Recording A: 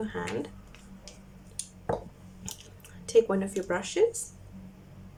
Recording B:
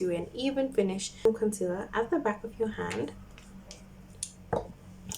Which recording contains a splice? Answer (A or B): B